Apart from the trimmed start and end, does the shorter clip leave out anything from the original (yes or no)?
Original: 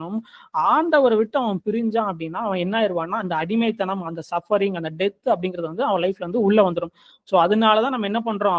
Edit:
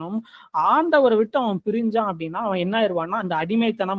no